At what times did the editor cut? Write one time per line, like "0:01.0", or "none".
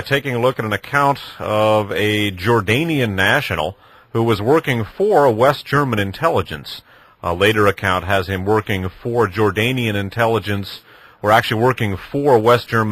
none